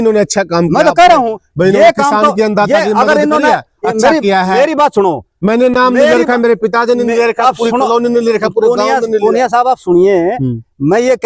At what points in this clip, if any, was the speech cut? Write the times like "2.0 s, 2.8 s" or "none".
none